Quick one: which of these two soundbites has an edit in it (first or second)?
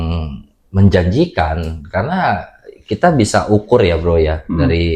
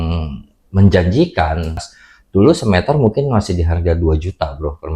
second